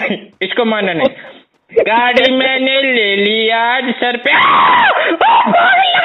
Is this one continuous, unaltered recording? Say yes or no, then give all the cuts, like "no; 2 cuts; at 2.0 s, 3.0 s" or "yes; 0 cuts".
yes; 0 cuts